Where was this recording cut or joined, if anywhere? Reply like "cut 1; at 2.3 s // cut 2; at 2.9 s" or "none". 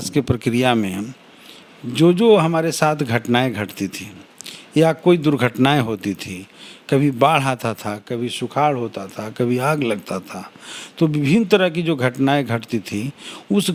none